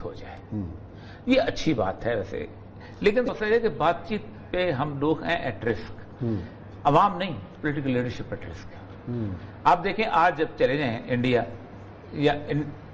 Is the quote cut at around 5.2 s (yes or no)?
no